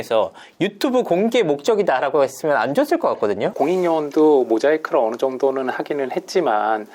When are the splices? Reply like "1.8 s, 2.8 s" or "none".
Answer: 3.5 s